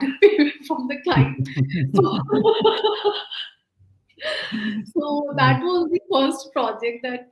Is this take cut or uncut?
uncut